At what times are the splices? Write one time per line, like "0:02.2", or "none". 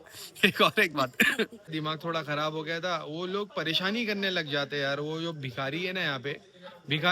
0:01.6